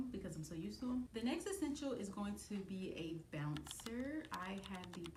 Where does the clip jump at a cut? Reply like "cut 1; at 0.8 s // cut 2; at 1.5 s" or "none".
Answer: none